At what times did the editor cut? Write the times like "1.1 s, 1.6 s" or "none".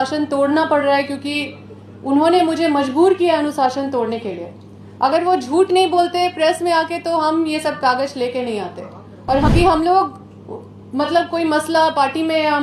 9.5 s